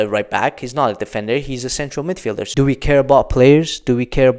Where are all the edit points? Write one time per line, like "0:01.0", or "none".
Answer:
0:02.4